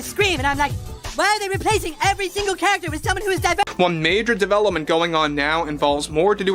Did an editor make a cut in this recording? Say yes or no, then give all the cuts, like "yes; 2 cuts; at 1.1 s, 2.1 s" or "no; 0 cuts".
yes; 1 cut; at 3.7 s